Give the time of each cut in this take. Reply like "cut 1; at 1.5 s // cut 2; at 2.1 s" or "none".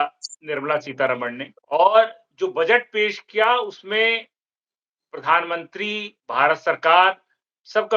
cut 1; at 1.5 s